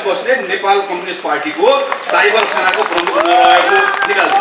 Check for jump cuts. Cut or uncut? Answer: uncut